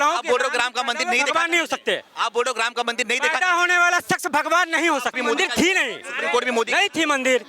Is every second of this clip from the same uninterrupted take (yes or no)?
no